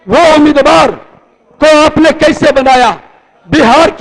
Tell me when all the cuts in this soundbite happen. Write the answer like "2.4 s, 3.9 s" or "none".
none